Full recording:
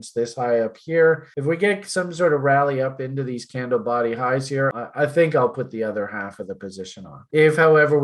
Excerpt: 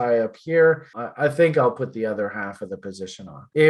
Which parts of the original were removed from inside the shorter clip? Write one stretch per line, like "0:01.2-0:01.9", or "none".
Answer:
0:01.4-0:04.7